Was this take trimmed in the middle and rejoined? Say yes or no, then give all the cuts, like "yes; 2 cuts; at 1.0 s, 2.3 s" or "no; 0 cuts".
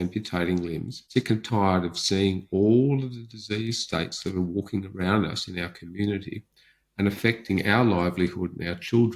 yes; 1 cut; at 0.9 s